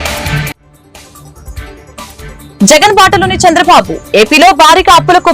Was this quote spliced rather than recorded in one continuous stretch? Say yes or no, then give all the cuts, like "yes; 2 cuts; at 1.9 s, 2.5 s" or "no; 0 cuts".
yes; 1 cut; at 2.6 s